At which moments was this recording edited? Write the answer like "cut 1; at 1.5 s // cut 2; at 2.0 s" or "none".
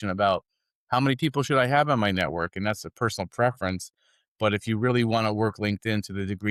none